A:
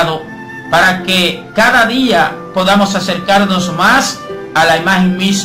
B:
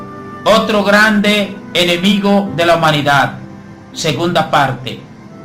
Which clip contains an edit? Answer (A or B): B